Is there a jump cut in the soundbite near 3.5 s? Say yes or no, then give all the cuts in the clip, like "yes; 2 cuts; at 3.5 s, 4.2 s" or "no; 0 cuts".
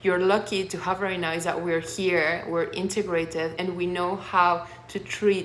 yes; 1 cut; at 3.5 s